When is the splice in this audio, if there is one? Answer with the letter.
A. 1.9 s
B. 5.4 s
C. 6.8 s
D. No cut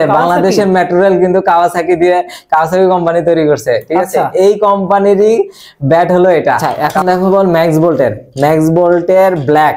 C